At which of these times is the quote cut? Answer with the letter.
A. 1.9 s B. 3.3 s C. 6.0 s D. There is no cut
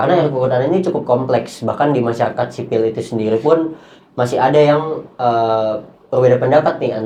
D